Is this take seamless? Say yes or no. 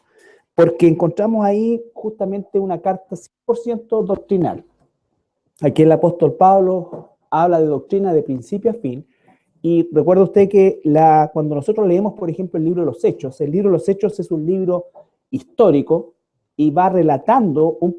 no